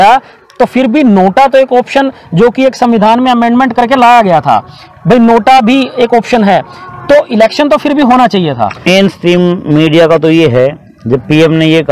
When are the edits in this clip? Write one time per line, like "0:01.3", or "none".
0:08.9